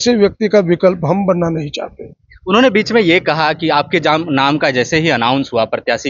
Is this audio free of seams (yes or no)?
yes